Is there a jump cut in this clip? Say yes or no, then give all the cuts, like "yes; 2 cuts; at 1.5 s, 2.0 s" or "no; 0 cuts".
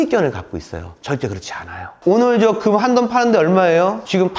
yes; 1 cut; at 1.9 s